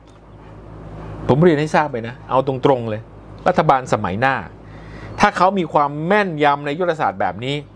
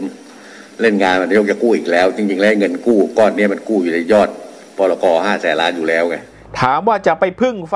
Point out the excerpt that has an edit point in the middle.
second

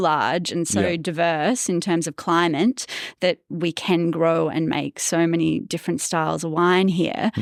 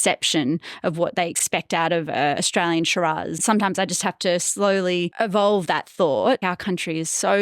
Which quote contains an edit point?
second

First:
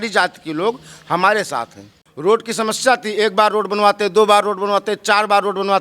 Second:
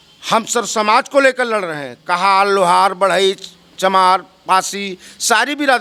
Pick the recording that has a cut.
first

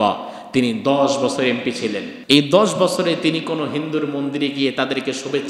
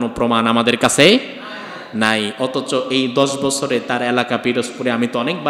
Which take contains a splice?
first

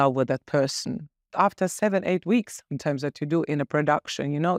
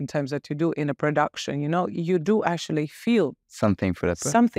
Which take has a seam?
first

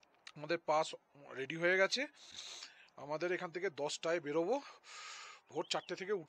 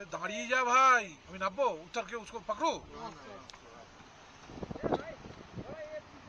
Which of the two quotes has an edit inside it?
second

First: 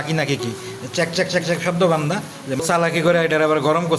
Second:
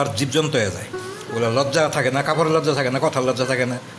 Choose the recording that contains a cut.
first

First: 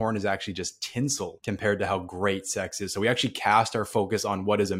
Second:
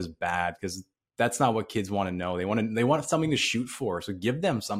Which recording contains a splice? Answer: first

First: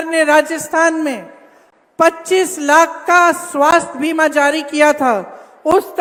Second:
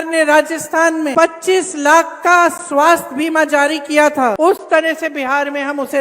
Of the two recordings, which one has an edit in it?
second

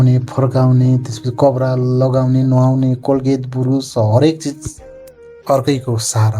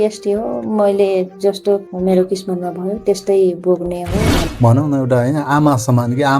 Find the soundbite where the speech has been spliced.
second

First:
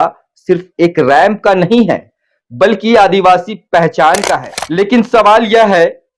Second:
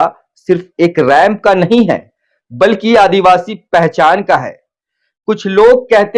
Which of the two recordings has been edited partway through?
first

